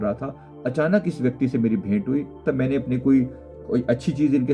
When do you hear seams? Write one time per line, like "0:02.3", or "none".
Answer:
0:02.4
0:03.5